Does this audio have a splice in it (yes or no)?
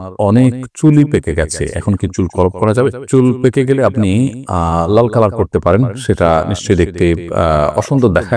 no